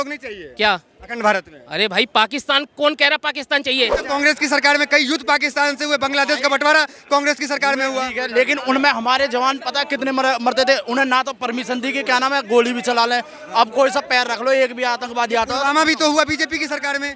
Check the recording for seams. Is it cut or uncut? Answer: cut